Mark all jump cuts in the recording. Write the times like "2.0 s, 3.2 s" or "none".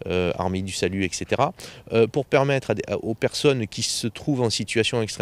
2.7 s